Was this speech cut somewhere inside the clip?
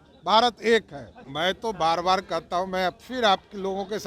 yes; 1 cut; at 1.3 s

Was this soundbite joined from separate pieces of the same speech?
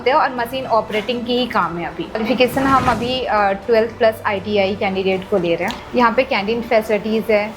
yes; 2 cuts; at 2.2 s, 5.8 s

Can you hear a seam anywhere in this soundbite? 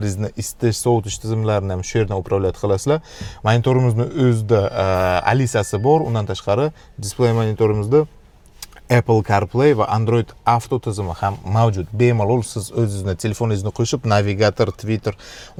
no; 0 cuts

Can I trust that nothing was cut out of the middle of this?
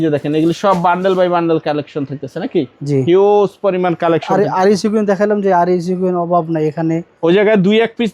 yes; 0 cuts

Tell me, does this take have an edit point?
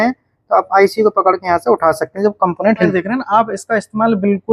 yes; 1 cut; at 2.9 s

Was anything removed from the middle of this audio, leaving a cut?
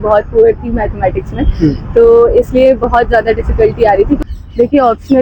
yes; 1 cut; at 4.2 s

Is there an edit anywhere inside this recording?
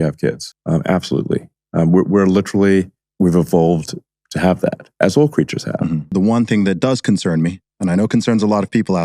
yes; 1 cut; at 6.0 s

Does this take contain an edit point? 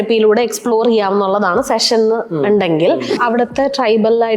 yes; 1 cut; at 3.2 s

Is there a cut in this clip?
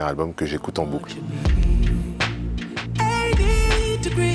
no; 0 cuts

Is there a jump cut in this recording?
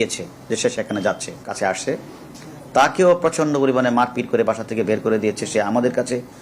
yes; 1 cut; at 1.4 s

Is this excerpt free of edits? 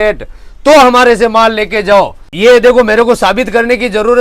no; 1 cut; at 2.2 s

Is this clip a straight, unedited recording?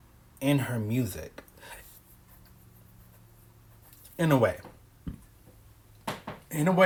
yes; 0 cuts

